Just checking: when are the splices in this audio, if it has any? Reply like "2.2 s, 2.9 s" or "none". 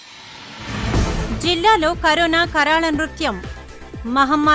1.3 s